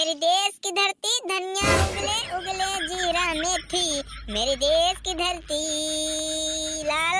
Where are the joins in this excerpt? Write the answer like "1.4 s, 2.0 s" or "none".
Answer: none

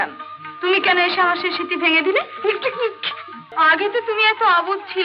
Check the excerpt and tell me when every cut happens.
3.4 s

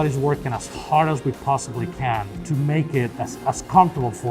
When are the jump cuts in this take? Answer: 2.4 s, 3.1 s

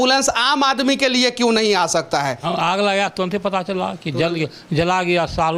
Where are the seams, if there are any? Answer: 2.4 s

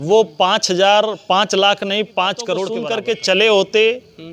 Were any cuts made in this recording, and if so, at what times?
2.7 s

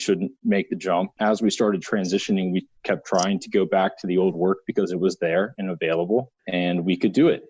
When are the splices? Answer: 1.1 s, 6.4 s

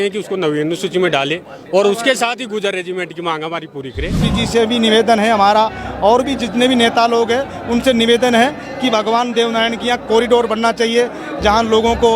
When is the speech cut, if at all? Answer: 4.2 s

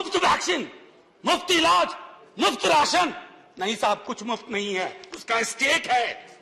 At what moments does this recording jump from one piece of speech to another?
none

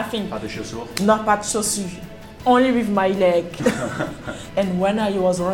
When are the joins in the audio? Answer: 4.4 s

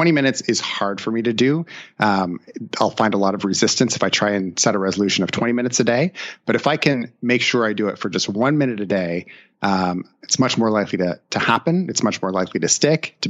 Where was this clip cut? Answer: none

